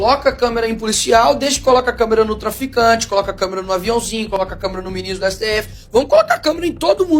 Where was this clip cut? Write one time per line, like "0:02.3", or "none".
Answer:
none

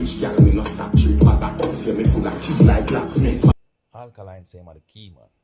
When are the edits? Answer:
0:03.6

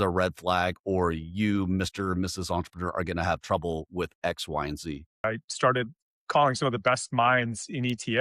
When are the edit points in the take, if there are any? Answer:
0:05.2

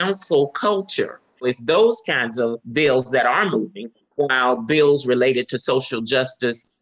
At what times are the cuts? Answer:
0:01.4
0:02.6

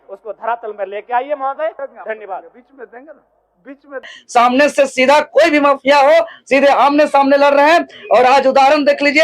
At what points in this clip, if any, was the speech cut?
0:04.3

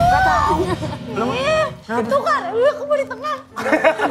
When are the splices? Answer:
0:01.8

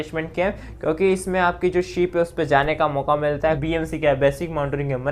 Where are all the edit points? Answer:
0:03.6

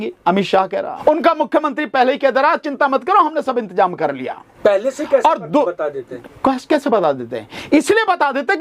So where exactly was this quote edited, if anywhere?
0:00.9
0:04.5

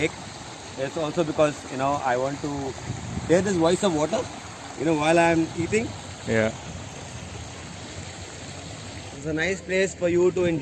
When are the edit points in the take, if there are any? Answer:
0:09.1

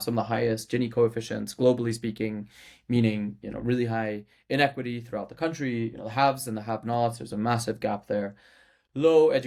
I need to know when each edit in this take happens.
none

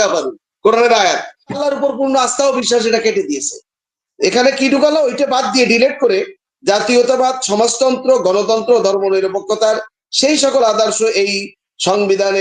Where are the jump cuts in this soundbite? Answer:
0:01.6

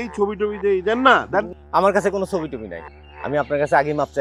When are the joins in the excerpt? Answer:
none

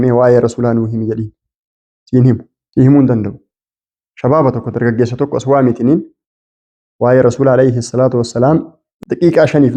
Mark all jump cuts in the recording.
0:02.6
0:08.8

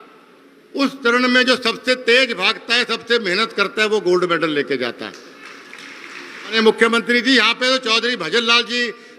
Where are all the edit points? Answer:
0:06.5

